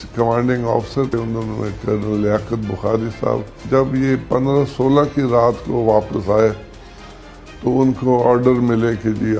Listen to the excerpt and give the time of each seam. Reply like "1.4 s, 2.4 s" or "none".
1.1 s, 3.6 s

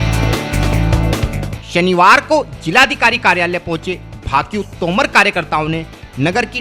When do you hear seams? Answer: 1.5 s

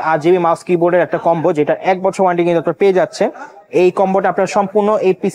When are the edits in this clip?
none

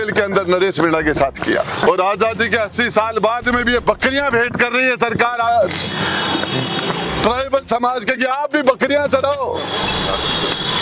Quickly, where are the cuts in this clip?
1.9 s

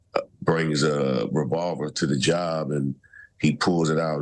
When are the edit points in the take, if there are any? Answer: none

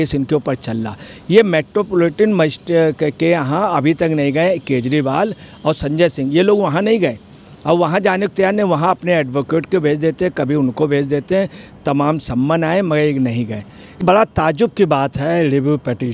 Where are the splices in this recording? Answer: 13.9 s

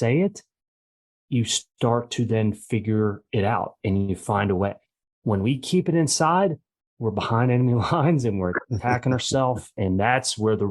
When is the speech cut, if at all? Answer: 9.8 s

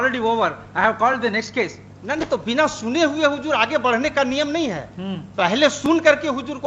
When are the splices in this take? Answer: none

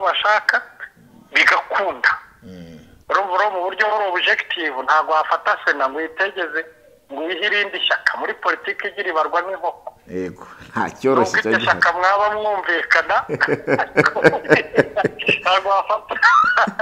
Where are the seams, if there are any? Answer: 2.9 s

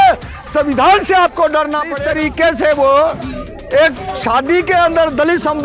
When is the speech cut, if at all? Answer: 1.9 s

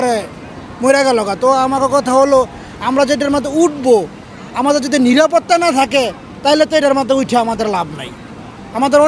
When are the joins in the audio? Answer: none

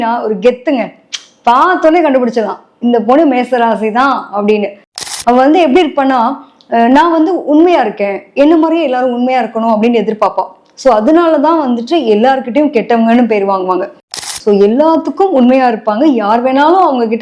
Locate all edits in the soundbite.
5.1 s, 14.1 s

